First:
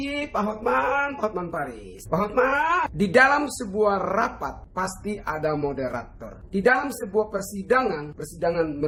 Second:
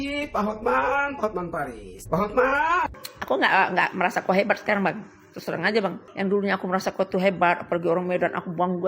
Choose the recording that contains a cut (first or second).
second